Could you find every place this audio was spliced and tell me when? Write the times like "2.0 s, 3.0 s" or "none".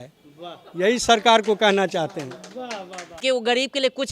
3.2 s